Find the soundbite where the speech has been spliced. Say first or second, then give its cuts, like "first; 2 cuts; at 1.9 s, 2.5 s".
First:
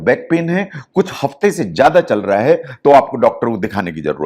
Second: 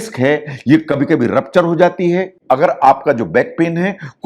second; 1 cut; at 2.3 s